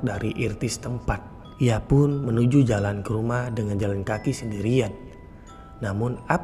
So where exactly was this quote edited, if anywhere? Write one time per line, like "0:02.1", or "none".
0:01.4